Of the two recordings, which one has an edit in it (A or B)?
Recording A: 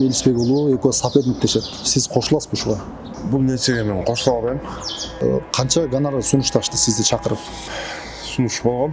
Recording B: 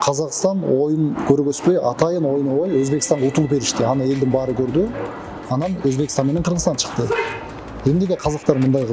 A